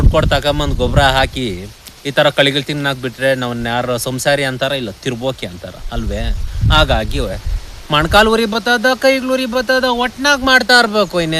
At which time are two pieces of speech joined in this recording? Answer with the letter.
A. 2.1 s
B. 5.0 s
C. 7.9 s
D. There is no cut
D